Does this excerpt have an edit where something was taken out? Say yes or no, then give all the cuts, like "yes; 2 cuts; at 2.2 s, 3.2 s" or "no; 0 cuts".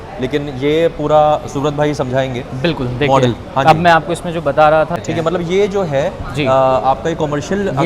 yes; 1 cut; at 4.9 s